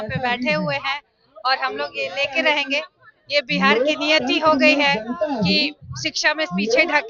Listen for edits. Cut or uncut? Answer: uncut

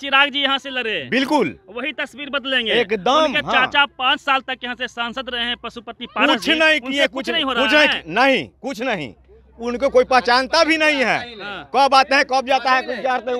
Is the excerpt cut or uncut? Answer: uncut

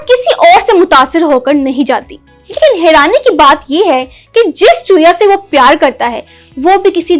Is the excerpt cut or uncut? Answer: uncut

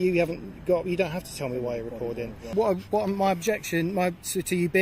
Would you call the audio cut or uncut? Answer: cut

